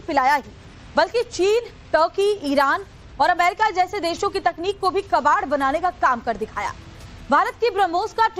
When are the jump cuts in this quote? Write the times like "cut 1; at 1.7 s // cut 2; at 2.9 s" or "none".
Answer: cut 1; at 3.4 s